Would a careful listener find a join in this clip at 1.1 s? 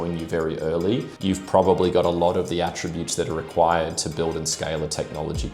yes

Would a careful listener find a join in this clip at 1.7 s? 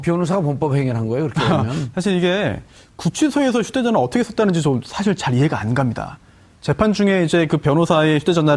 no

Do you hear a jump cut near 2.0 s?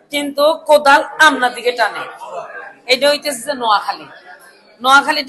no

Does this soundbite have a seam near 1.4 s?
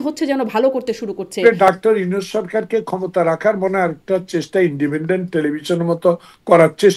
yes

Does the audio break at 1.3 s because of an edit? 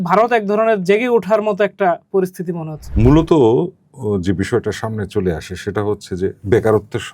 no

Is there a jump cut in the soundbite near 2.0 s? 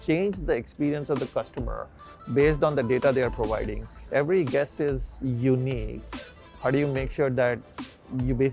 no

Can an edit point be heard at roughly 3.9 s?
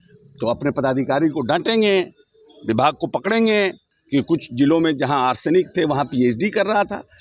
yes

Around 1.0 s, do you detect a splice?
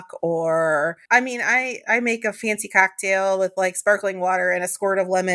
yes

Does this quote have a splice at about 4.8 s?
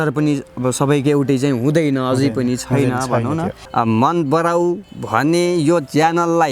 no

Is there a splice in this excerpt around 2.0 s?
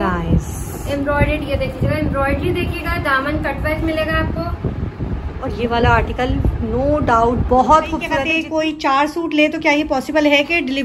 no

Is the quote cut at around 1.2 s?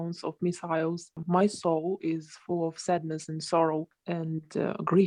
yes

